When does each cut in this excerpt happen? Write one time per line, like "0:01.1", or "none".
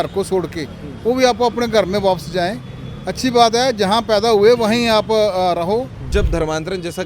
0:06.1